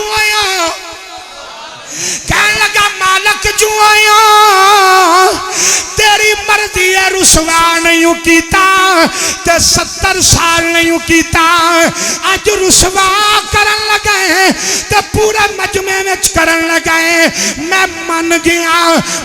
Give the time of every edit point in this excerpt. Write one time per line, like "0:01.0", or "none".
0:02.1